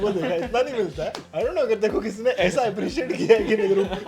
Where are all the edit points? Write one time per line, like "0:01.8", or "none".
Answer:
0:01.2